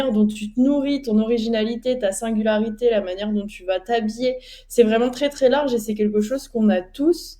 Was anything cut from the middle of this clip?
no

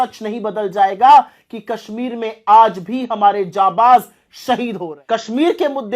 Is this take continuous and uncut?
no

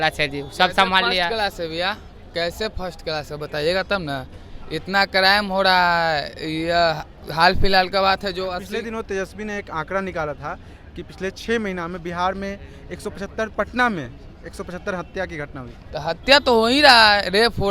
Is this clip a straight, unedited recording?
yes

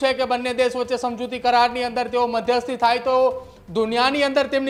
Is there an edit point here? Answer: no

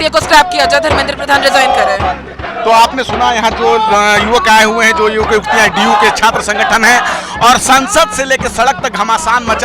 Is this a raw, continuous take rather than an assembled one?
yes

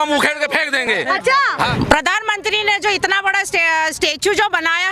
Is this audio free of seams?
yes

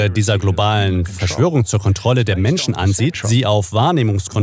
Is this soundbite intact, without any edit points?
no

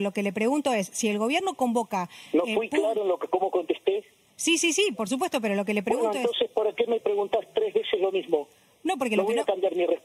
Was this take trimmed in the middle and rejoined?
no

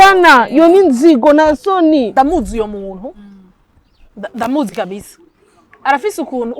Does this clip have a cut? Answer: yes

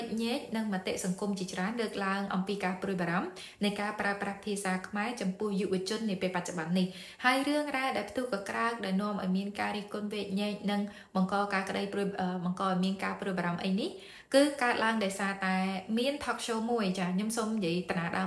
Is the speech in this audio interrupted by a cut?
no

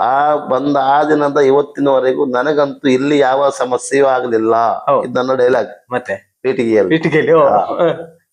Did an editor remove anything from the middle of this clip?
no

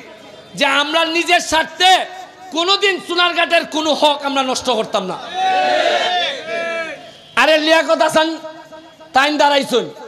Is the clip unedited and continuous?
yes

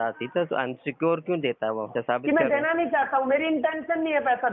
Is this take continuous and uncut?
no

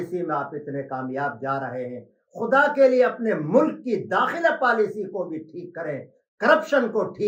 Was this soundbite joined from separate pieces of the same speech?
no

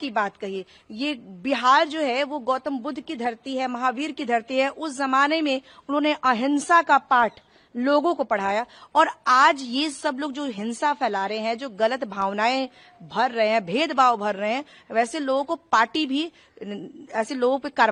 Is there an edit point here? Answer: no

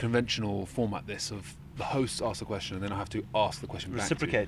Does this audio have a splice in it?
no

